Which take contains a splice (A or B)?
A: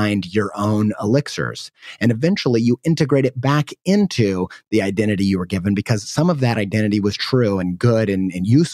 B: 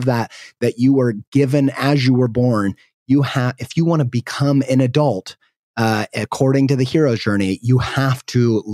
A